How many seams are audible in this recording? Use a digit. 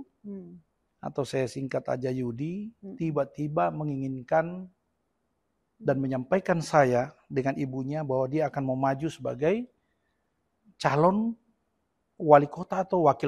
0